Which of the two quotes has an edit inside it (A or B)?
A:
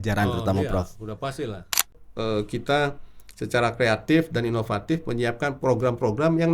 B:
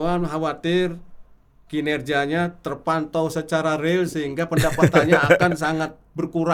A